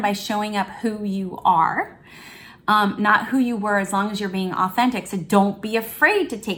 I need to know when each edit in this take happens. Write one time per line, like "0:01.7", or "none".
none